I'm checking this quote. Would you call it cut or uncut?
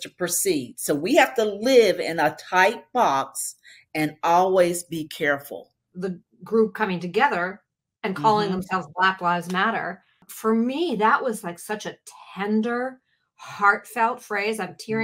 cut